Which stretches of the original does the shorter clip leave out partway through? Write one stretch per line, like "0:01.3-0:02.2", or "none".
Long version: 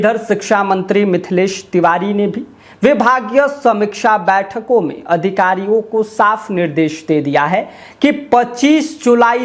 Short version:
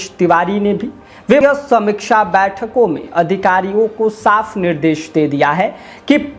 0:02.9-0:03.3